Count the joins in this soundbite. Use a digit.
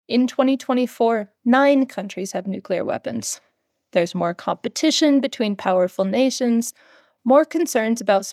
1